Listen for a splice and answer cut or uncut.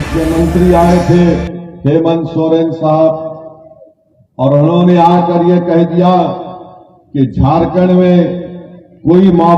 uncut